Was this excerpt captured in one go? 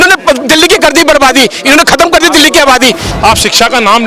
no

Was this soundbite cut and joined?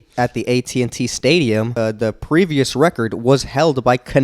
yes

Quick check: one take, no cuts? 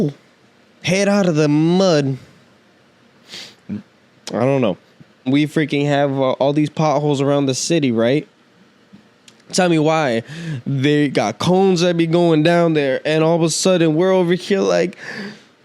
no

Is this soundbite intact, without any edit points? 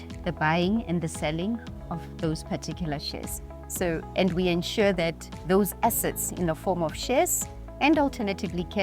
yes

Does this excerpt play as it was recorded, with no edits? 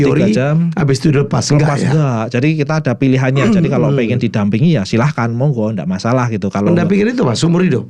yes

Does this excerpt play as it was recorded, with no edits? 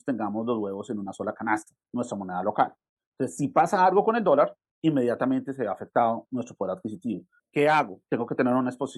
no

